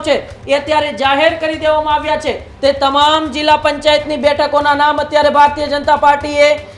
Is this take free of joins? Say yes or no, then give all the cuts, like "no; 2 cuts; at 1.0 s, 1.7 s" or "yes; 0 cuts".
no; 1 cut; at 2.4 s